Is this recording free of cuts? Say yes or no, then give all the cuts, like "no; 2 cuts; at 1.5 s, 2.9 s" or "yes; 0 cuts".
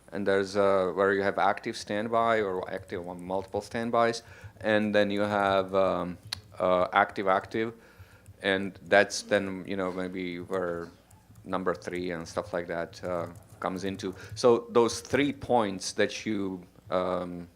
no; 1 cut; at 9.1 s